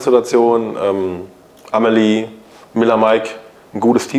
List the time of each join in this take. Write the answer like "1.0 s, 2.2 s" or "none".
none